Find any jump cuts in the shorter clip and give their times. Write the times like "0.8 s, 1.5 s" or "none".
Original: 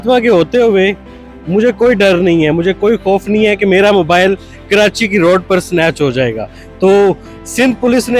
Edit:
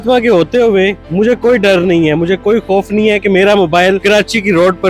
1.0 s, 4.0 s